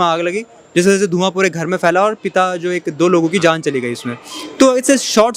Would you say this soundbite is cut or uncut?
uncut